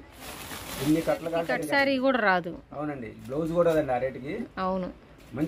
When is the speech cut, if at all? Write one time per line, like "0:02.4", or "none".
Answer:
0:01.6